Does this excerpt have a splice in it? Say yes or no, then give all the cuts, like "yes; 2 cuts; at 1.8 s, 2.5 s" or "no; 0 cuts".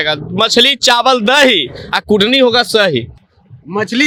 no; 0 cuts